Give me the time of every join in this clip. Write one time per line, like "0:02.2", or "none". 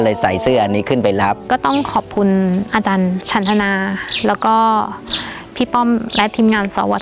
0:01.4
0:02.9